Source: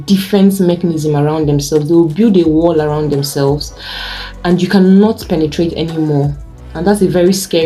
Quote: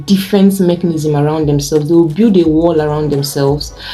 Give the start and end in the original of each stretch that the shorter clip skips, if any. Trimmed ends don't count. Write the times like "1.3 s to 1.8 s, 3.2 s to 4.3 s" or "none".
none